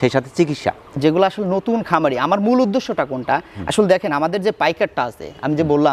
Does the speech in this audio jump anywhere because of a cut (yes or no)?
yes